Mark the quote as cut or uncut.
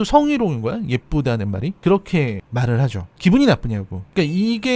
uncut